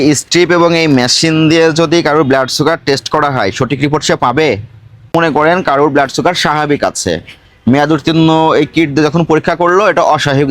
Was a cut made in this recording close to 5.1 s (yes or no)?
yes